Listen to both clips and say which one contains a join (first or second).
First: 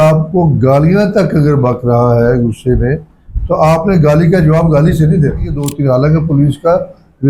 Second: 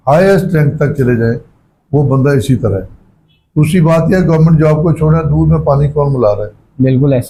first